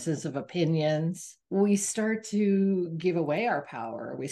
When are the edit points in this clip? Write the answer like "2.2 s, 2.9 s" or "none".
1.3 s

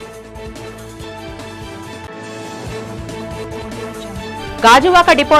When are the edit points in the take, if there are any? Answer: 1.0 s

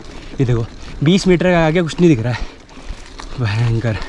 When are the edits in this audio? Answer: none

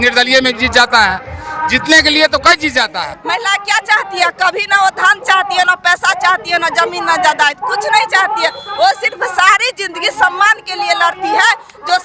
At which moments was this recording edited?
3.1 s

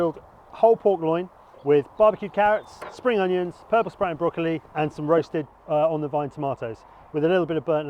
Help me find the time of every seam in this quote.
1.9 s, 4.7 s

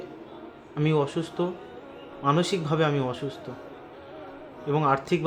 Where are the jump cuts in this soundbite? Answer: none

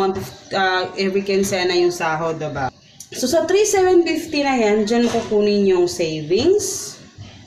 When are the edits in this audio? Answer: 2.7 s

